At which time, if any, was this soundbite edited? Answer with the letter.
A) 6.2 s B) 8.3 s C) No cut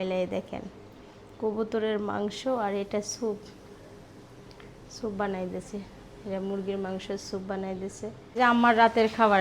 B